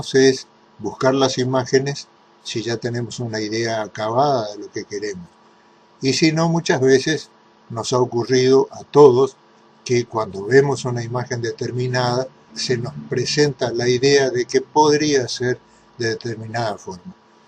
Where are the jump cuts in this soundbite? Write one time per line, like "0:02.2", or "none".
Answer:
none